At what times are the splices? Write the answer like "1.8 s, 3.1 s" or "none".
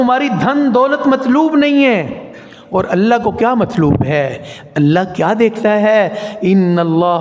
none